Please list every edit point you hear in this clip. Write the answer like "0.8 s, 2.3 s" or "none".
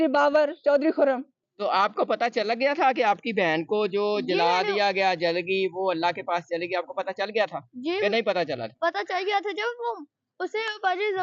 1.4 s